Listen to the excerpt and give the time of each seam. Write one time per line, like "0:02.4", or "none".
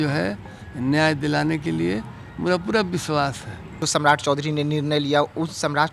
0:03.7